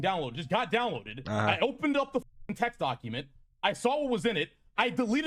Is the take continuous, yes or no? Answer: yes